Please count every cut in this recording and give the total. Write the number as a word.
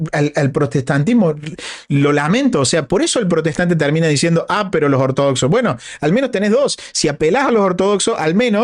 zero